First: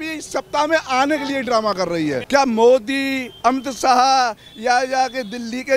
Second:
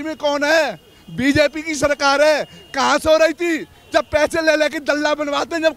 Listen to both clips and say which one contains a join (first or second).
first